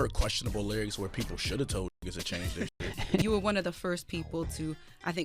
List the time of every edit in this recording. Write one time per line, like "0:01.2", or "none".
0:03.2